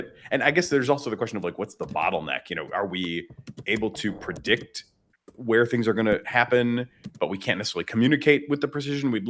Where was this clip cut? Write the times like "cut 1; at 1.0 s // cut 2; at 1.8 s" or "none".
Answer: cut 1; at 1.8 s